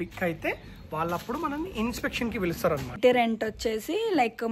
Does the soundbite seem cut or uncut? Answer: cut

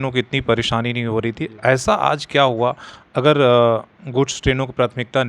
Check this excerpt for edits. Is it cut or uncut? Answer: uncut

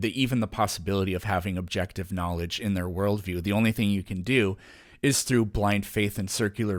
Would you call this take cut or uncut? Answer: uncut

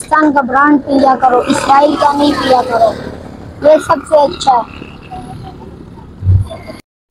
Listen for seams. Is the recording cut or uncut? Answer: uncut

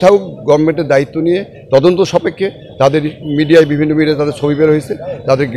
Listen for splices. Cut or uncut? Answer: uncut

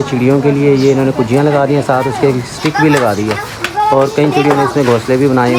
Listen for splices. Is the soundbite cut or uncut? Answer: uncut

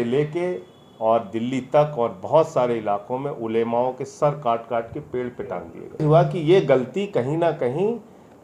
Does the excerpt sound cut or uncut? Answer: cut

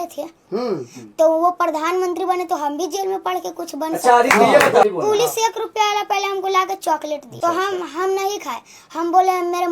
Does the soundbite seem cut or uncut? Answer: cut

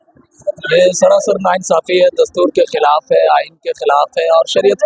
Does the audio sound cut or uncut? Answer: uncut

